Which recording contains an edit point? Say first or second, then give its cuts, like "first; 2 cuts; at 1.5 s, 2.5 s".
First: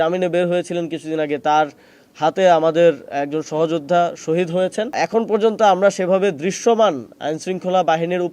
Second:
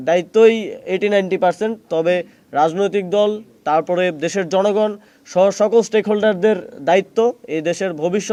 first; 1 cut; at 4.9 s